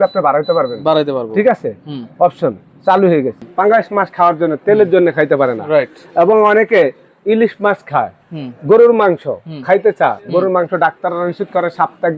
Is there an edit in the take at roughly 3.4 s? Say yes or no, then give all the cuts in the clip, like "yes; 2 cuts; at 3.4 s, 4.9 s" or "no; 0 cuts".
yes; 1 cut; at 3.4 s